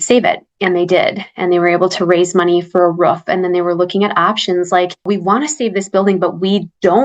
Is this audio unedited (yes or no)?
yes